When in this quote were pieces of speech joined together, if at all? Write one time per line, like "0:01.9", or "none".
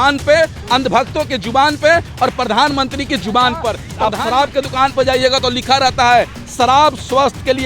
0:03.9